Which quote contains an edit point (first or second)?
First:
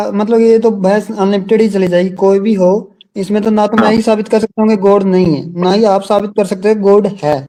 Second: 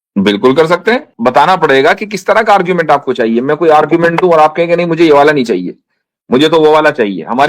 second